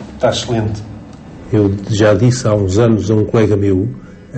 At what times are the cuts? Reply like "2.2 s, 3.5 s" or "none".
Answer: none